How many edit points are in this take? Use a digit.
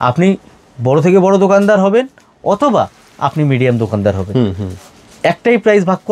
0